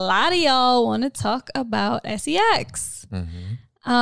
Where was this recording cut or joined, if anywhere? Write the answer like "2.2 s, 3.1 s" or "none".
none